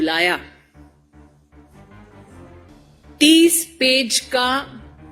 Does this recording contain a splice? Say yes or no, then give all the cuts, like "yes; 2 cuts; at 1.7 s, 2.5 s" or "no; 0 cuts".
yes; 2 cuts; at 1.1 s, 3.2 s